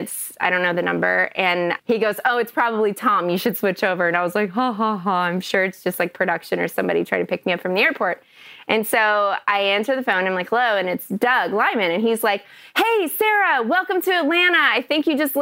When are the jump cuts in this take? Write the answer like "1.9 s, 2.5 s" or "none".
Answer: 1.8 s, 7.4 s